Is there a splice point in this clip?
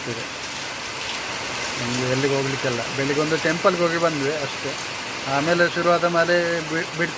no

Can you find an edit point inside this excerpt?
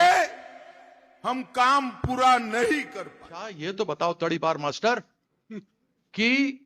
yes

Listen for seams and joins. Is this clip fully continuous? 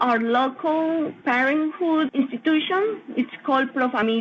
yes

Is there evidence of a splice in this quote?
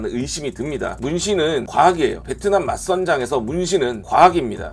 yes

